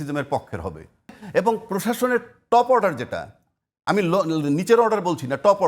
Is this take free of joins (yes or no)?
no